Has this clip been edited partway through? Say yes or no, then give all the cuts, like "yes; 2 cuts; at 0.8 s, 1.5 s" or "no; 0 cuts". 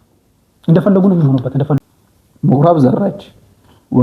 yes; 1 cut; at 1.8 s